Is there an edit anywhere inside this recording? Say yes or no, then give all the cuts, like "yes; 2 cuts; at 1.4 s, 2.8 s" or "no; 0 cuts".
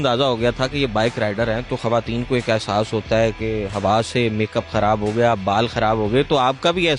no; 0 cuts